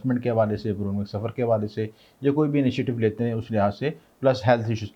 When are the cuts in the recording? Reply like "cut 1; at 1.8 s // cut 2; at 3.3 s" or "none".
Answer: none